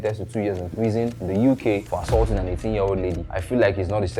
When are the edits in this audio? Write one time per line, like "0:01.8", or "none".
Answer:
0:01.2
0:01.9
0:03.3